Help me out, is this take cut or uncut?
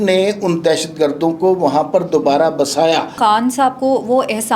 cut